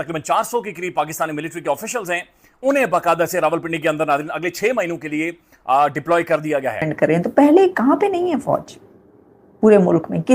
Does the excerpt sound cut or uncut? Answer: cut